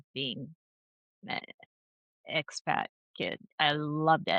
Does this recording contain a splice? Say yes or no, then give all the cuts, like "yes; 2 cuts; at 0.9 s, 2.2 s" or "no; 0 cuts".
no; 0 cuts